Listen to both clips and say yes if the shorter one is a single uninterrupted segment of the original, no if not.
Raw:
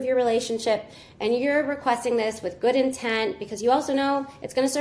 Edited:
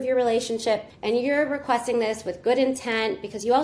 no